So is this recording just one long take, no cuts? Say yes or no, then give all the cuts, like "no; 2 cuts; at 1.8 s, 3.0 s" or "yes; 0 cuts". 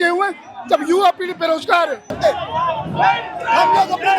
no; 1 cut; at 2.2 s